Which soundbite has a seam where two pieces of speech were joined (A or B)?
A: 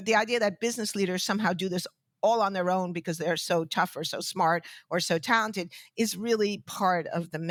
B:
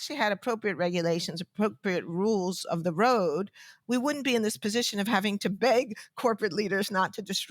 B